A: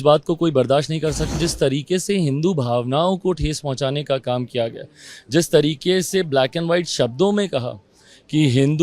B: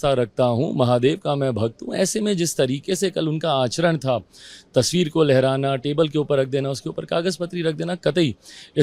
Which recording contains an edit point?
A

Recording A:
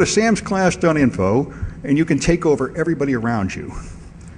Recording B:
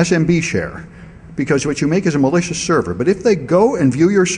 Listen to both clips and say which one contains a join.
A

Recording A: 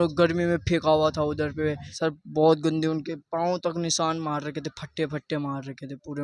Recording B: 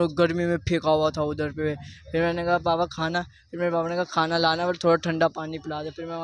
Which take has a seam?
A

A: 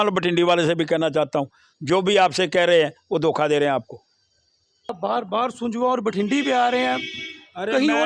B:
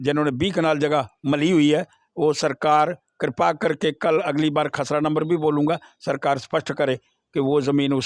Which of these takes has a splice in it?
A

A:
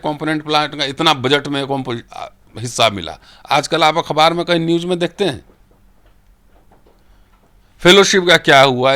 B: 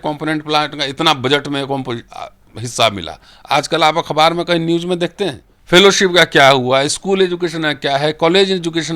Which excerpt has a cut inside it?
B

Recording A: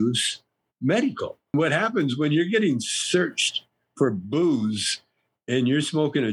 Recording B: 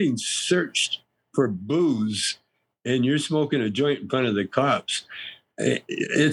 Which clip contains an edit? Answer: A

